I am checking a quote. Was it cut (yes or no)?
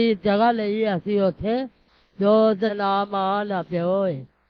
yes